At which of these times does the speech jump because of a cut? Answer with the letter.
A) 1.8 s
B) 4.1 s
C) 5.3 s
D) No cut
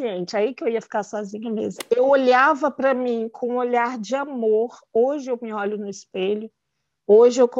A